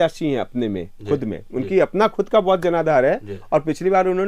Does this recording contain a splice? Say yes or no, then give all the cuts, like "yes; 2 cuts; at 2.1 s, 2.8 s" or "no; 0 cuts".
no; 0 cuts